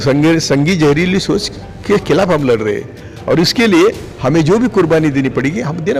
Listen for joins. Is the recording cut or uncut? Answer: uncut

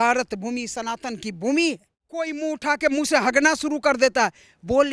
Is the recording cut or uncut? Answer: uncut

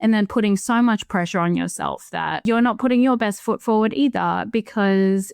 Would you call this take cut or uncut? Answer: cut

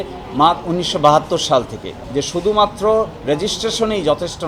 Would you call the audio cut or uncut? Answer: cut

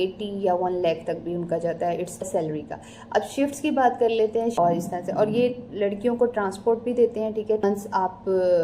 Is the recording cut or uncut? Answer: cut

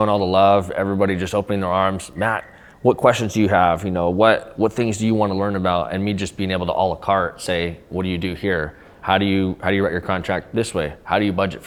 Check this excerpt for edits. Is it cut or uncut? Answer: uncut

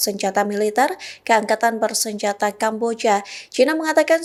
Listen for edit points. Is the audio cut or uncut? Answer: uncut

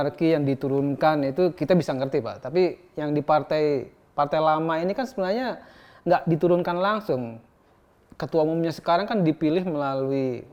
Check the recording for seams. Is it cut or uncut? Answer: uncut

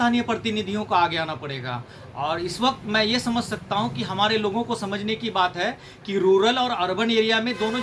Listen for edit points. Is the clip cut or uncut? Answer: uncut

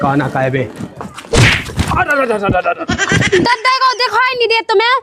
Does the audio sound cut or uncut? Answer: uncut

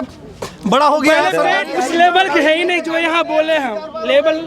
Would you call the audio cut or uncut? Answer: cut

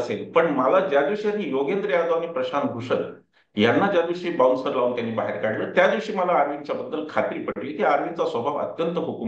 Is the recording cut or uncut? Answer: uncut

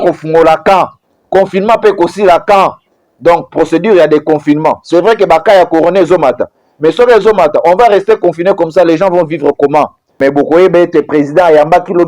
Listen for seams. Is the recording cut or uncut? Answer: cut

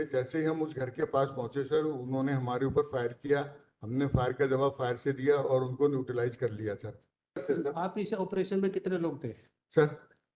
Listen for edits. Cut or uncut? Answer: cut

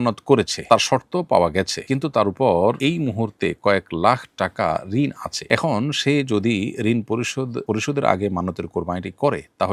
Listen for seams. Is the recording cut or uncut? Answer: uncut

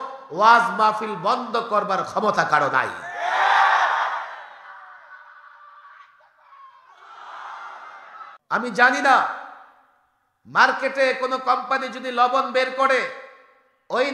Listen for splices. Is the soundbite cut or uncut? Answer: cut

